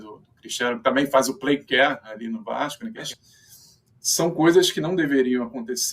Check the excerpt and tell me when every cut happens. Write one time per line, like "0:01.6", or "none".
0:03.1